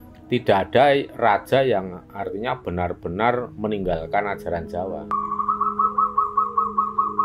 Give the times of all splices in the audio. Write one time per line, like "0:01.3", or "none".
0:05.1